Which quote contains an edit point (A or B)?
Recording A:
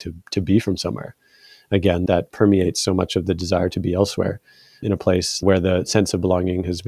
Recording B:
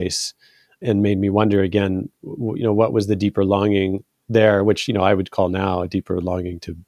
A